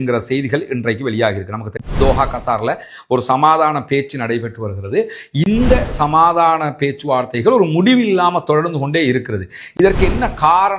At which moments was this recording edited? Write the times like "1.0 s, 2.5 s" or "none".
1.8 s